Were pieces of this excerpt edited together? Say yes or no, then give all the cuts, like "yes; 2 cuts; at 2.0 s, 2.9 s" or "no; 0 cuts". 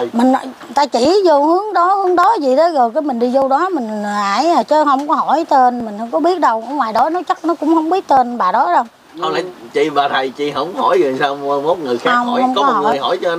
no; 0 cuts